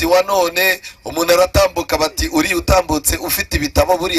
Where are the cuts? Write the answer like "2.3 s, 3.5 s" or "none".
none